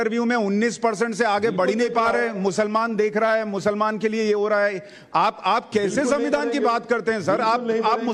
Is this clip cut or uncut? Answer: uncut